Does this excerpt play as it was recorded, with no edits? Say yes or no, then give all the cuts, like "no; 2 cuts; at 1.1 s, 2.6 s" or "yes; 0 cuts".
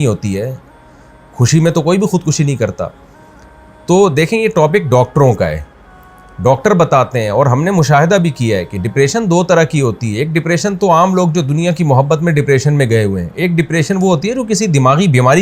yes; 0 cuts